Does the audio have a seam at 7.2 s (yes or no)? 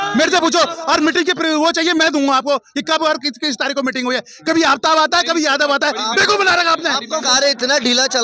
yes